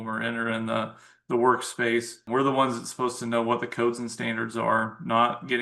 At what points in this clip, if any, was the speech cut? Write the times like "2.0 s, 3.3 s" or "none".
2.2 s